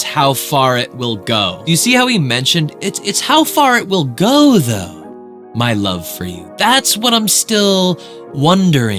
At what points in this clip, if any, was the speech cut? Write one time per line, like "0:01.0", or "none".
none

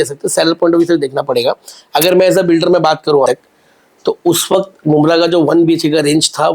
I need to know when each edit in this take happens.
0:03.3

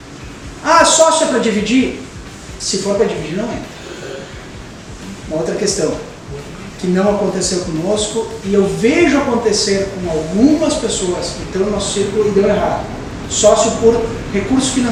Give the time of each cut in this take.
none

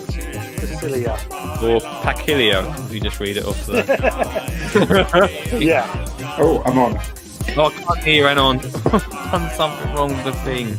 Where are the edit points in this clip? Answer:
none

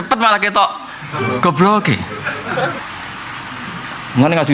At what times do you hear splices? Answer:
0:02.8

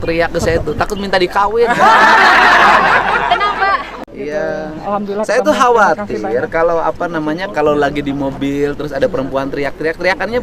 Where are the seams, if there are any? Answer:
0:04.0

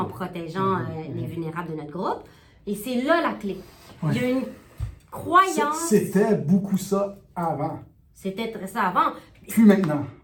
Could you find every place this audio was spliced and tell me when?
none

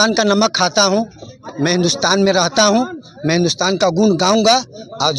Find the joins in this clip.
none

